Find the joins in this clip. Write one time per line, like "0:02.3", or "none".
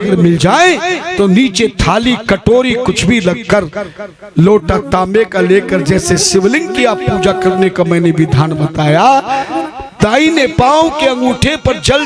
none